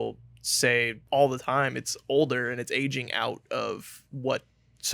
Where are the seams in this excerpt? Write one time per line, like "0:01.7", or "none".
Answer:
0:01.0